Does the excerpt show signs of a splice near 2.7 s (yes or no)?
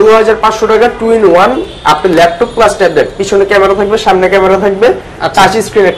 no